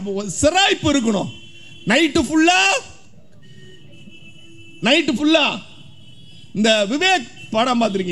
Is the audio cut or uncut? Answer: uncut